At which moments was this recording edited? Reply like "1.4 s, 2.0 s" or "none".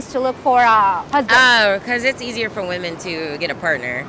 1.0 s